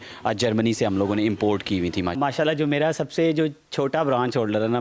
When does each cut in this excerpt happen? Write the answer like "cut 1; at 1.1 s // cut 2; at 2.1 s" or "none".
cut 1; at 2.2 s